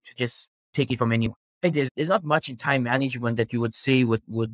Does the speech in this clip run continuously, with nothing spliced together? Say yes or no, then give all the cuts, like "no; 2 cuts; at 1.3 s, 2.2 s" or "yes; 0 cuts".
no; 1 cut; at 1.4 s